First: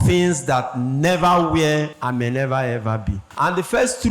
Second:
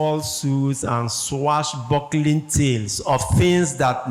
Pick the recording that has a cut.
first; 2 cuts; at 1.9 s, 3.2 s

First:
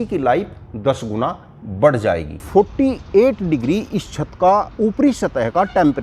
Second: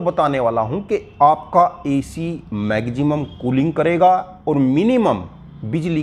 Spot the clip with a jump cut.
first; 1 cut; at 2.4 s

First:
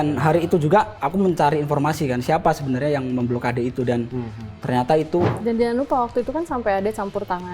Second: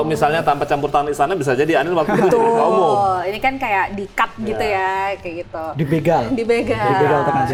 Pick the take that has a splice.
first; 2 cuts; at 0.9 s, 5.3 s

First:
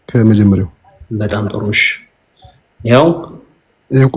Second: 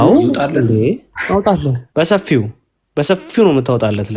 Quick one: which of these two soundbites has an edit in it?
second; 1 cut; at 1.8 s

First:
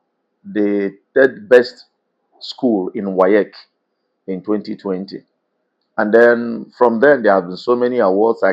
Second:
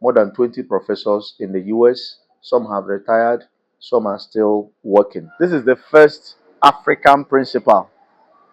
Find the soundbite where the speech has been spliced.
second; 1 cut; at 5.2 s

